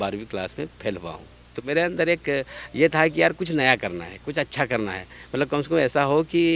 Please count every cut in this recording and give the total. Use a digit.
1